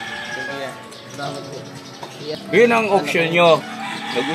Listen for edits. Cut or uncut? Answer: cut